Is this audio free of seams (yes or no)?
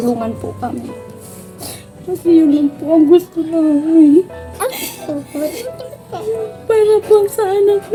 yes